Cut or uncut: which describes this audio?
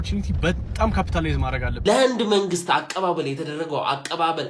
cut